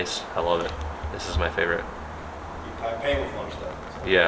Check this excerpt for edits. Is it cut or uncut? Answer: uncut